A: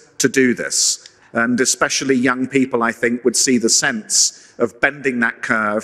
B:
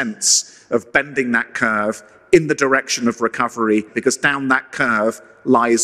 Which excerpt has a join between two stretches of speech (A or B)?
B